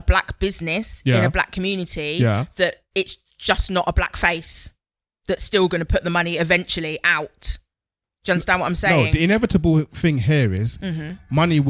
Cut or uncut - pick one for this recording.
uncut